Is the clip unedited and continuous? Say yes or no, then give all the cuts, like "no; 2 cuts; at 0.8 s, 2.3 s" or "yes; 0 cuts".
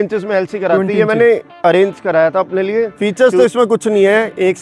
no; 1 cut; at 2.9 s